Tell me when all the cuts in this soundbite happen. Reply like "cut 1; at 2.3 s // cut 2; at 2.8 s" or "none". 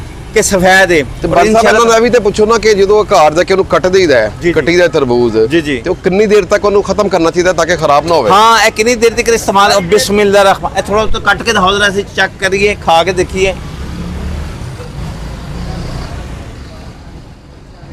none